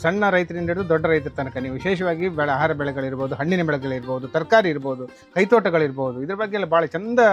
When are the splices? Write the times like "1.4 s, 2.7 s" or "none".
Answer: none